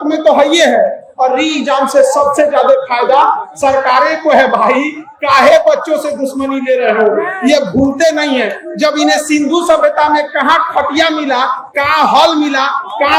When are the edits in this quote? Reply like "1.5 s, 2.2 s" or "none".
none